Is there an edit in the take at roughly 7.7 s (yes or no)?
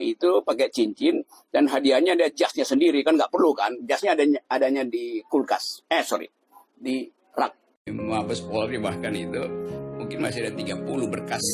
yes